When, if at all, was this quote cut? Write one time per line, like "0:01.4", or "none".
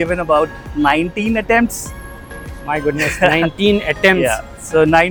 none